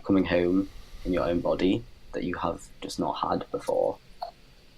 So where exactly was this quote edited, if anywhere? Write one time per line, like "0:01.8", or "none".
none